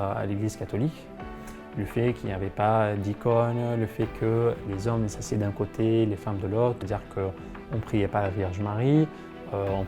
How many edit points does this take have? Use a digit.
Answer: 2